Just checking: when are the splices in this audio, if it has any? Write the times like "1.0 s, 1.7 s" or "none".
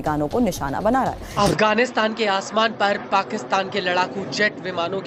1.3 s